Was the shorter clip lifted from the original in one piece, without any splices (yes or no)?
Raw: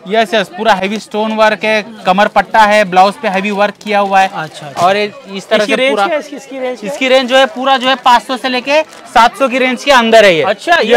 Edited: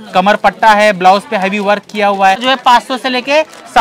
no